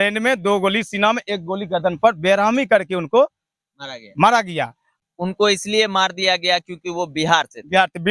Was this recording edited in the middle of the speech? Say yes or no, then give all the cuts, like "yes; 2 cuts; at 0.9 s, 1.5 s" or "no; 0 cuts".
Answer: yes; 1 cut; at 4.9 s